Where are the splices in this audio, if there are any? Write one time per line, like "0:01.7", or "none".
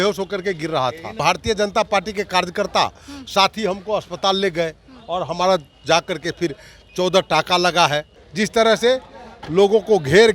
0:01.2
0:08.2